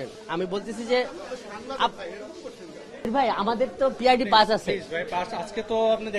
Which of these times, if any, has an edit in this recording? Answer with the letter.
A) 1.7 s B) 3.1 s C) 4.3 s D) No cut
B